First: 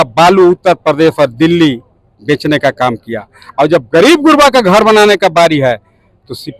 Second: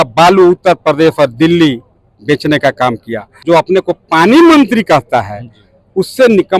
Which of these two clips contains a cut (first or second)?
second